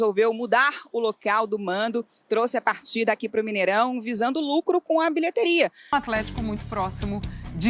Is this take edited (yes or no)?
yes